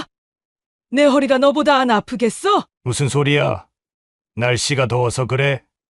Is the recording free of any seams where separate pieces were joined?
no; 1 cut; at 2.7 s

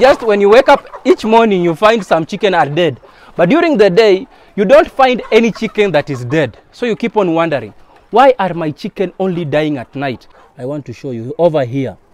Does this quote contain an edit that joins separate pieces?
yes; 1 cut; at 10.3 s

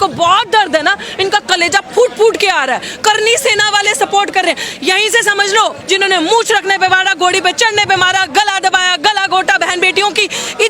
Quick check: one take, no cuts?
no; 1 cut; at 5.8 s

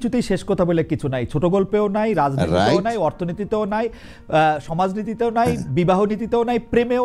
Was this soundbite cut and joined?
no; 0 cuts

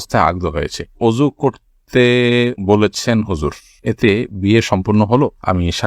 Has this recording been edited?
no; 0 cuts

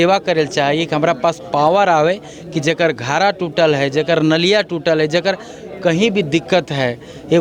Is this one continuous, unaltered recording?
yes; 0 cuts

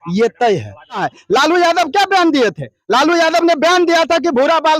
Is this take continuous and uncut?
no; 1 cut; at 1.1 s

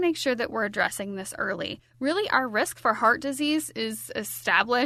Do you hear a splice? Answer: no; 0 cuts

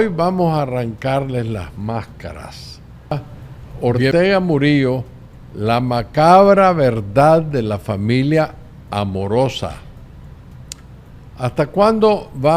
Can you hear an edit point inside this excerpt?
yes; 1 cut; at 3.1 s

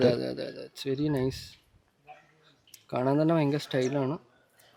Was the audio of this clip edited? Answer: no; 0 cuts

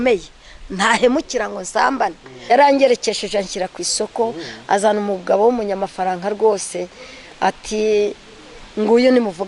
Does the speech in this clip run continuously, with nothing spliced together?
no; 1 cut; at 2.5 s

